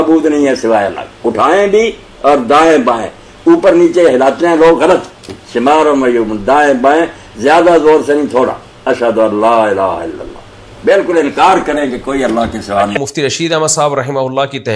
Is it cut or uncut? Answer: cut